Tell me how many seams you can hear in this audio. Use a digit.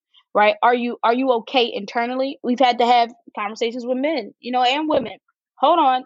1